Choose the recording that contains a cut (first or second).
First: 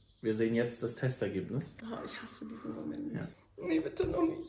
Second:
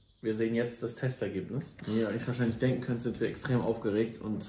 first